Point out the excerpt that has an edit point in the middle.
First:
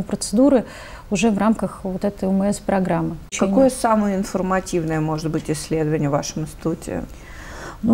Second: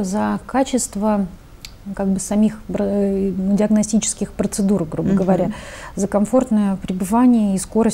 first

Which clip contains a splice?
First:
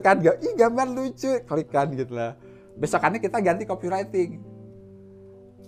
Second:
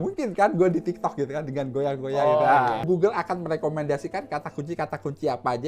second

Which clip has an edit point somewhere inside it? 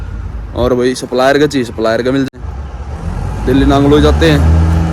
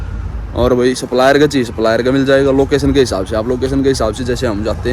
first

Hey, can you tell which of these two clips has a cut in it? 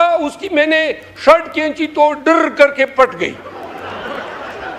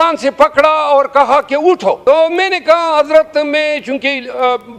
second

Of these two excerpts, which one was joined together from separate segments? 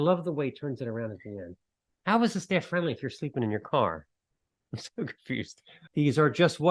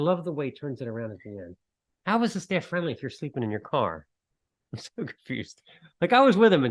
first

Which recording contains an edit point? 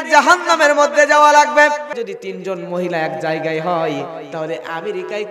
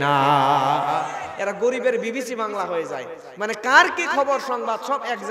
first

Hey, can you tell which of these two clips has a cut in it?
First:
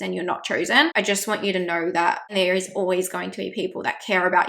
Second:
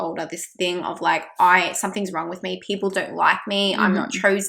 first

